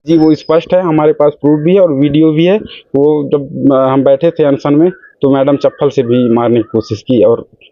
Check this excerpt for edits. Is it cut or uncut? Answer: uncut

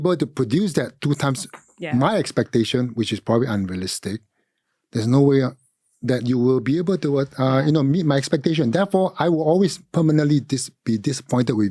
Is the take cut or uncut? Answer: uncut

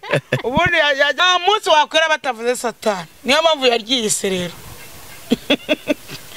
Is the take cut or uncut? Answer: cut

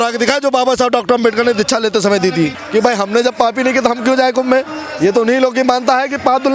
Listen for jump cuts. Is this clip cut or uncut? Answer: cut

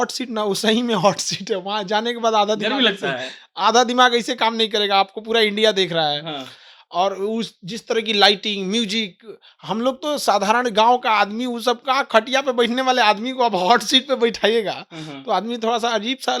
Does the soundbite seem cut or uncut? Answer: uncut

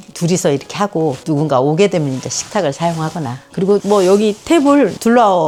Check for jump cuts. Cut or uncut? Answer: uncut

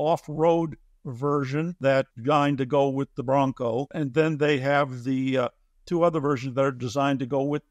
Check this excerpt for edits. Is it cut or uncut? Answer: uncut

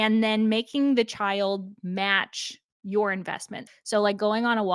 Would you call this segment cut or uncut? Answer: cut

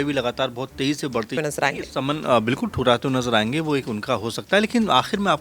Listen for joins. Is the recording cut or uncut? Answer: cut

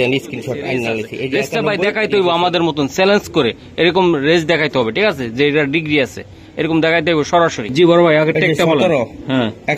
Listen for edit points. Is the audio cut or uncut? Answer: cut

